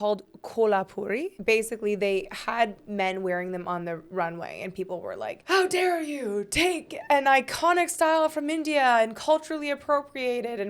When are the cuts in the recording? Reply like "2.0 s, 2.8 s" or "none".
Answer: 1.3 s